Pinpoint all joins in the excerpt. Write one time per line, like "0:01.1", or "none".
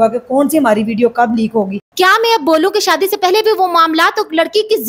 0:01.8